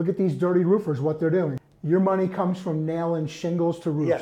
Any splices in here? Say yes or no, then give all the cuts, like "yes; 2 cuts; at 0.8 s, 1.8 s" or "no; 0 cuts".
yes; 1 cut; at 1.6 s